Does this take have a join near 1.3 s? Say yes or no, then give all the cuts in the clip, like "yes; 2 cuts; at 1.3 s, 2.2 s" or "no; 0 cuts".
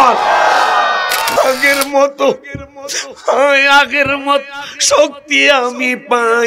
yes; 1 cut; at 1.3 s